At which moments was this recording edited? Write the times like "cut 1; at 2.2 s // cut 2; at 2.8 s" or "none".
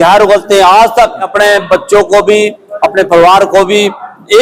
cut 1; at 1.2 s